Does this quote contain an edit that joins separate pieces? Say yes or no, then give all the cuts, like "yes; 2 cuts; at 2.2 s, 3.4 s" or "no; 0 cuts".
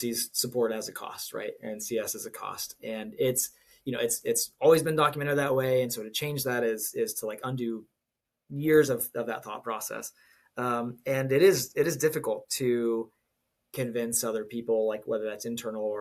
no; 0 cuts